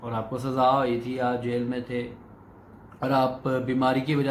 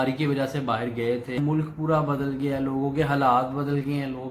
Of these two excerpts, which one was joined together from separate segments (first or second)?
second